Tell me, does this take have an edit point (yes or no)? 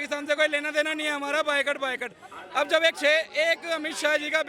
no